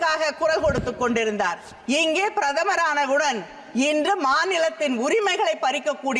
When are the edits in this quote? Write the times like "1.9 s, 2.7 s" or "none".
none